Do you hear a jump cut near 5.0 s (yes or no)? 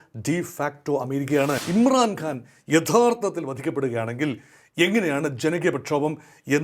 no